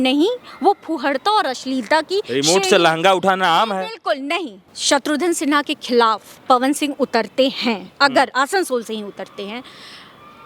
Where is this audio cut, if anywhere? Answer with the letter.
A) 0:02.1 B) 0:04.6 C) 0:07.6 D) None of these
B